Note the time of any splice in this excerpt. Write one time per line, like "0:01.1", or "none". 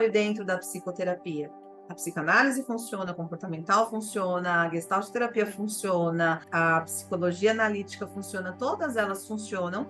0:01.6
0:06.5